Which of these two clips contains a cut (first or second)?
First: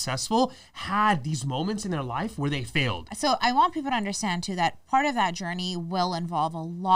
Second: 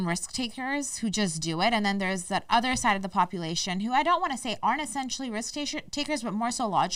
first